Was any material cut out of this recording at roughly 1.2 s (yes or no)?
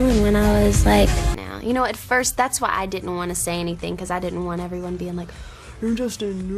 no